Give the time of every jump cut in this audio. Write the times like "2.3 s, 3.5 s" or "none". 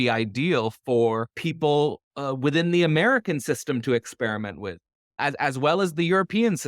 1.4 s